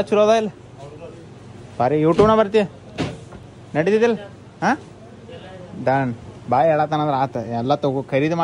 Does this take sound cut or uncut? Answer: uncut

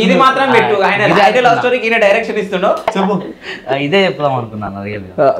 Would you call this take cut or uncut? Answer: cut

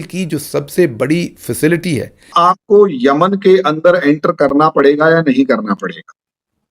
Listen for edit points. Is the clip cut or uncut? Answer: cut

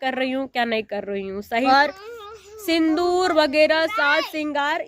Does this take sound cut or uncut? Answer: cut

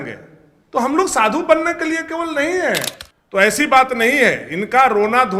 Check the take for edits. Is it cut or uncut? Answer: cut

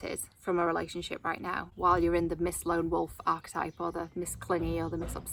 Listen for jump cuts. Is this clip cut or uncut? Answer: uncut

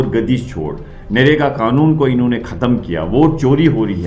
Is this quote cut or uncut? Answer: uncut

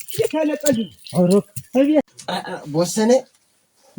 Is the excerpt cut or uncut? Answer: cut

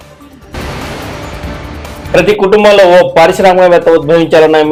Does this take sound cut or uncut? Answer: uncut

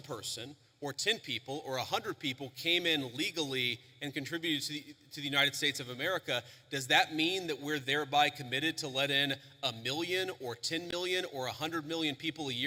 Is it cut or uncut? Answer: uncut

